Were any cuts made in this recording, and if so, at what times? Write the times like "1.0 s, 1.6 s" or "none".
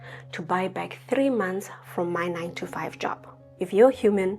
3.4 s